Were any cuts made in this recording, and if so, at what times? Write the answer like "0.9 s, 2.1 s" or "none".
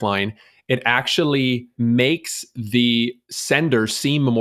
3.3 s